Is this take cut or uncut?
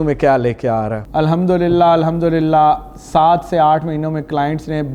cut